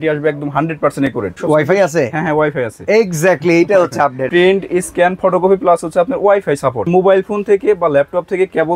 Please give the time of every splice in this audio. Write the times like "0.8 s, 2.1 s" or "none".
1.4 s, 4.3 s, 6.9 s